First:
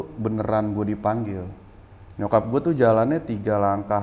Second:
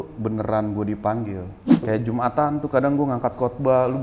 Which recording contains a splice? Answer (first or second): second